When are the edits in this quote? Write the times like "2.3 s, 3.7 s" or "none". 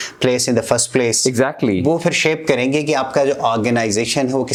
none